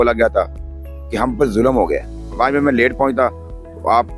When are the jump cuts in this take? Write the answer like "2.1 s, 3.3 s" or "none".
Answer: 2.2 s